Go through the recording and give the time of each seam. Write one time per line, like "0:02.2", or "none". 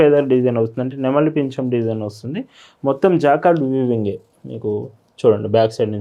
none